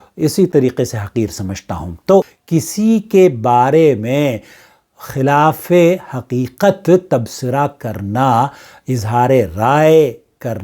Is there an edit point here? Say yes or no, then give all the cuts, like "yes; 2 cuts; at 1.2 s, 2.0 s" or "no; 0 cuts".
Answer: yes; 1 cut; at 2.3 s